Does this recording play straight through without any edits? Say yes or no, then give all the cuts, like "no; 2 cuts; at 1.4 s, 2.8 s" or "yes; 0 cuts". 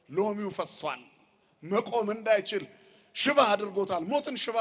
yes; 0 cuts